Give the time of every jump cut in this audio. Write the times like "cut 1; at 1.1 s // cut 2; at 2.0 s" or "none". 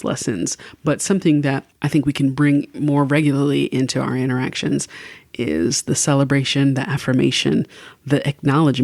cut 1; at 1.7 s